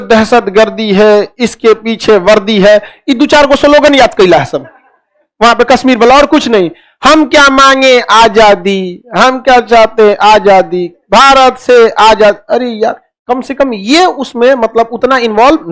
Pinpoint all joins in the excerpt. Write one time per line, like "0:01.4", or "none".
none